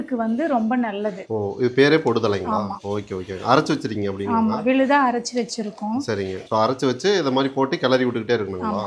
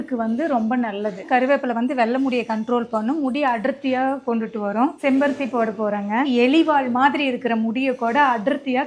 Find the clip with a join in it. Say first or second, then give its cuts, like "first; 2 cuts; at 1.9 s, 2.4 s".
second; 3 cuts; at 1.2 s, 5.0 s, 6.3 s